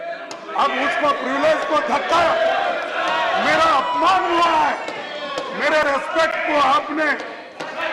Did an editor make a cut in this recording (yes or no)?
no